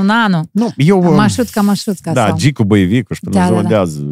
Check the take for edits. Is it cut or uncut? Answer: uncut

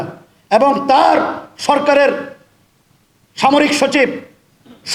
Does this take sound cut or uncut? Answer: uncut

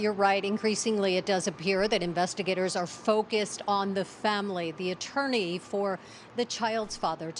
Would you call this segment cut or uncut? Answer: cut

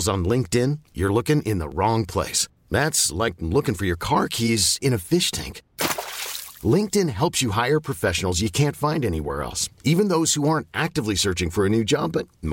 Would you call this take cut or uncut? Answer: uncut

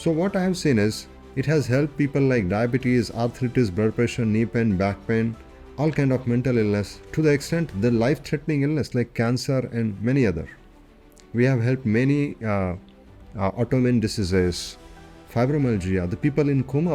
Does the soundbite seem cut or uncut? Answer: uncut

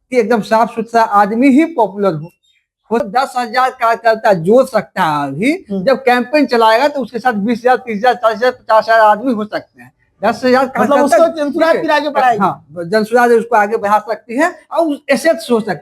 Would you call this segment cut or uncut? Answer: cut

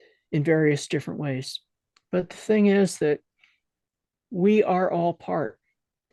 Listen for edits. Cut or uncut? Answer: uncut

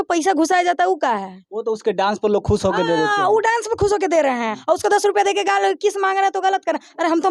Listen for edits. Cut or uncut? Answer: uncut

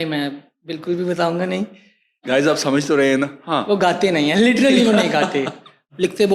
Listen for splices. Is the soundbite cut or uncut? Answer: cut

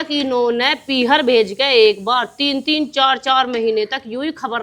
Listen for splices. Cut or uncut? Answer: uncut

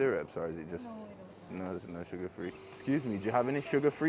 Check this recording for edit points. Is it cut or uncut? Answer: cut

